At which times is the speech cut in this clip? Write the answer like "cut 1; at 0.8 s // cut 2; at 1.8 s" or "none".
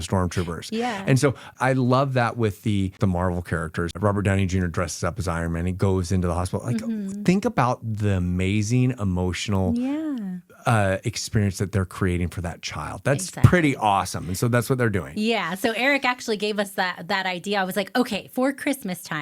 cut 1; at 1.5 s // cut 2; at 3.0 s // cut 3; at 3.9 s